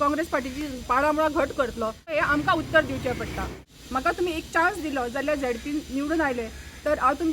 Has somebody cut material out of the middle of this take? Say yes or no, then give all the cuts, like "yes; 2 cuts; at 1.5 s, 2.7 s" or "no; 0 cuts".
yes; 2 cuts; at 2.1 s, 3.6 s